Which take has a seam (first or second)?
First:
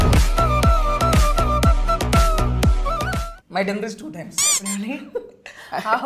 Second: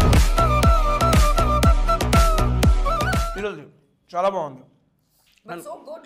first